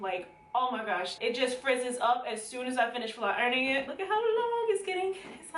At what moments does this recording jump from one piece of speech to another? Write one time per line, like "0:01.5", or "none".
0:01.2
0:03.9